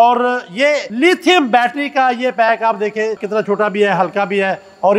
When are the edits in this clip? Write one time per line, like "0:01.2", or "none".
0:00.9
0:03.2